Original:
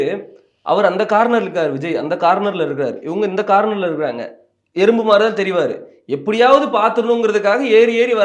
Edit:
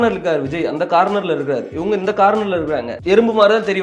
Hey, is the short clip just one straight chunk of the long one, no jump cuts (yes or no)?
no